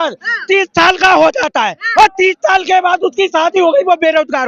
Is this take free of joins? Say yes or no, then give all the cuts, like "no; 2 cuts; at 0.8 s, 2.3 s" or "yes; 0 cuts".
yes; 0 cuts